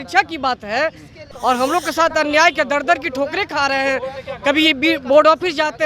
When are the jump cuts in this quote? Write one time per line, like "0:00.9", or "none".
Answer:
0:01.2